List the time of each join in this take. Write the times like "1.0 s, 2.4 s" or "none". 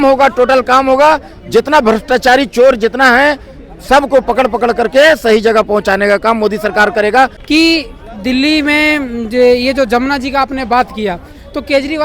7.4 s